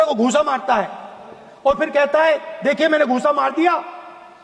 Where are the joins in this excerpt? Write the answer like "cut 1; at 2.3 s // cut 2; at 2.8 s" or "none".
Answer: none